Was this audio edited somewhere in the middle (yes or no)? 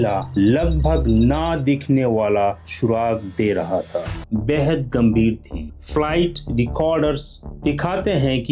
yes